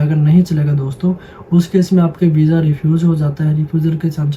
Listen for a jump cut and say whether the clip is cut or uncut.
uncut